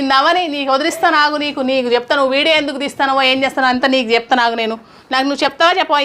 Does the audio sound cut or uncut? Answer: uncut